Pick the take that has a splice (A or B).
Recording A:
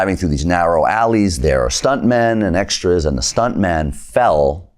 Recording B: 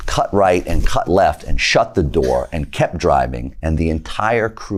A